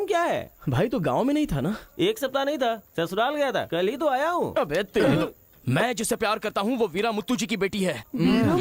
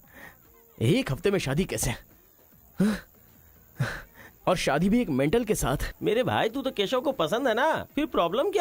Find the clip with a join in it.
second; 1 cut; at 5.9 s

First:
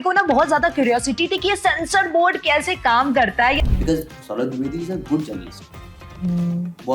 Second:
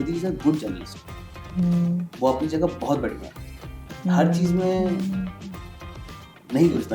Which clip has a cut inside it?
first; 1 cut; at 3.6 s

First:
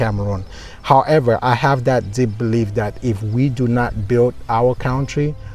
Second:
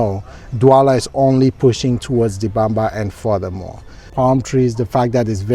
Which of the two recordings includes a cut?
second; 1 cut; at 4.0 s

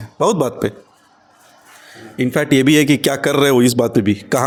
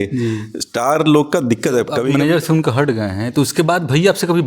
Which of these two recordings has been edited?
second; 1 cut; at 2.0 s

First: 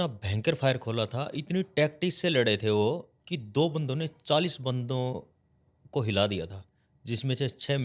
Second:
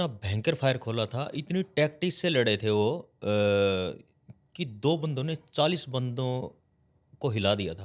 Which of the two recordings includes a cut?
first; 1 cut; at 3.1 s

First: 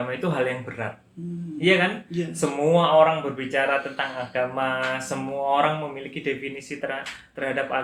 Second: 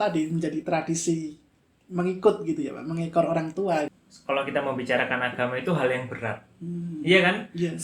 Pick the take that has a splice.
second; 1 cut; at 4.1 s

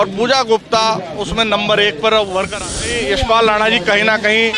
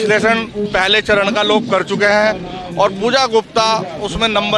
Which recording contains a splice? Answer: first; 1 cut; at 2.9 s

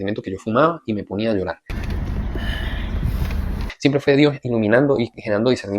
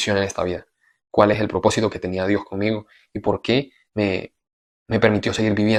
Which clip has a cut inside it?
first; 2 cuts; at 1.7 s, 3.7 s

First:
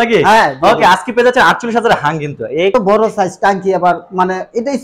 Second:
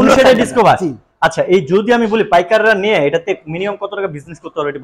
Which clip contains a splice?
first; 1 cut; at 2.7 s

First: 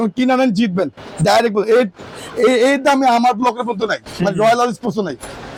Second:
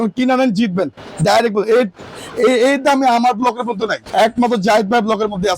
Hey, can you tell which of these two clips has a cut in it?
second; 1 cut; at 4.0 s

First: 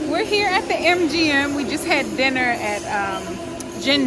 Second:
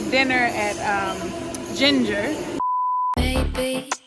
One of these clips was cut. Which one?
second; 1 cut; at 2.9 s

